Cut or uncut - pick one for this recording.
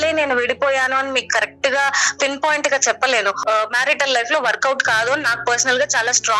cut